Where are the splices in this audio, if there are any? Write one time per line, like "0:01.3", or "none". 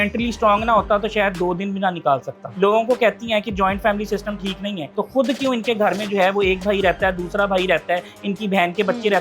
0:02.4
0:04.8